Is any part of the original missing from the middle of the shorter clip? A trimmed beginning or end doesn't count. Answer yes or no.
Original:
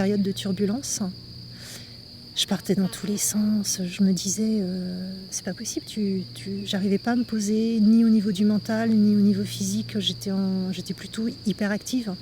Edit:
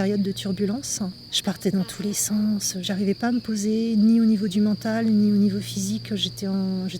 yes